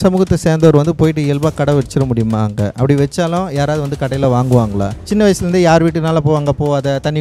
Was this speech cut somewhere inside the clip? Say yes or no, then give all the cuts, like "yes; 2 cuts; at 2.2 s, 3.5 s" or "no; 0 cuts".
yes; 1 cut; at 5.0 s